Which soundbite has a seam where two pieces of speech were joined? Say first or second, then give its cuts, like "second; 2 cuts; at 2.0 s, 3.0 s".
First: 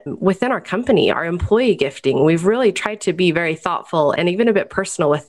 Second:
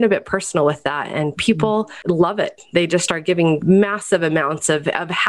second; 2 cuts; at 1.9 s, 3.6 s